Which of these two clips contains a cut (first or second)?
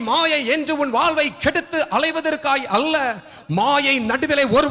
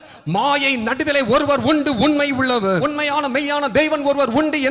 second